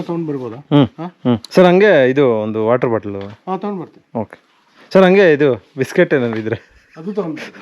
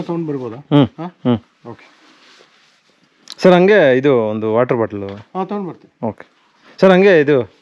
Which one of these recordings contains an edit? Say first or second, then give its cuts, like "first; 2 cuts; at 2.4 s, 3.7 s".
first; 1 cut; at 1.5 s